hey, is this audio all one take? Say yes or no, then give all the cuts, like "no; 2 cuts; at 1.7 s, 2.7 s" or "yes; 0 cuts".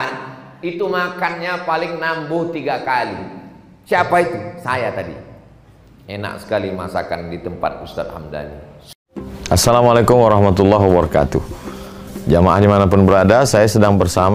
no; 1 cut; at 8.9 s